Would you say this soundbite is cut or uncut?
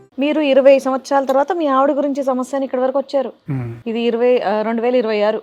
uncut